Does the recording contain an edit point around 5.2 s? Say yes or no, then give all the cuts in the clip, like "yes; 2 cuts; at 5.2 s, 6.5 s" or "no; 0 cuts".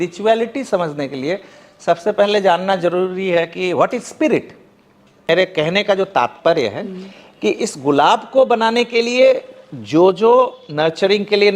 yes; 1 cut; at 5.2 s